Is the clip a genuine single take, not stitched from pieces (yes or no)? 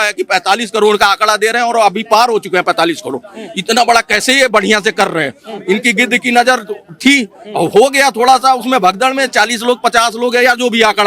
yes